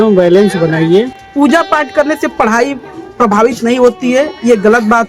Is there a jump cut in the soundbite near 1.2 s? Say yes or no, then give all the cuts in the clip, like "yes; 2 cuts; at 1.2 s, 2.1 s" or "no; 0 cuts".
yes; 1 cut; at 1.2 s